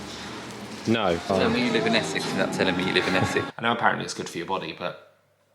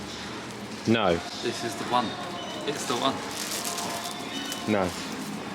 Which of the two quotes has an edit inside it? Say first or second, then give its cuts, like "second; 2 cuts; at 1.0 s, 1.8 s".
first; 2 cuts; at 1.2 s, 3.5 s